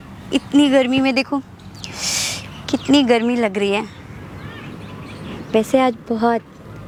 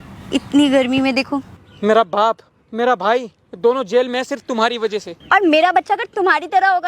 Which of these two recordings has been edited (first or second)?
second